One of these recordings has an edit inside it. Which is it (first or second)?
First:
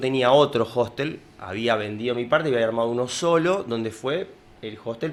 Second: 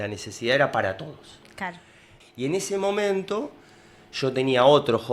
second